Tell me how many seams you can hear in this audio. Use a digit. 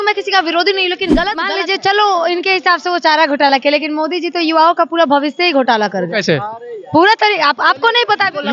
1